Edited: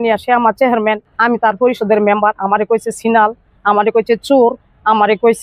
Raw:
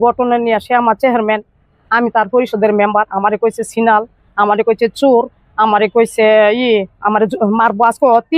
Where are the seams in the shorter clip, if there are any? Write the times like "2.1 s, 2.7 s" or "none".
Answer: 1.1 s